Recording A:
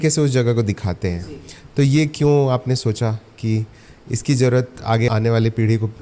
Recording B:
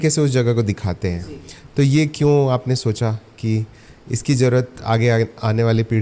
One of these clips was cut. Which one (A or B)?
A